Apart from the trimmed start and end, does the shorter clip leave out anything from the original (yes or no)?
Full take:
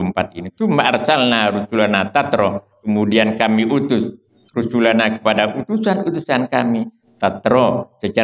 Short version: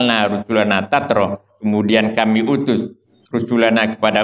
no